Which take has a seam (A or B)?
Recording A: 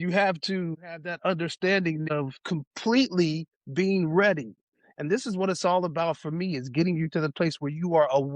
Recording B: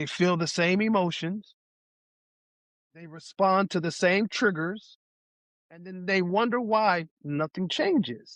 A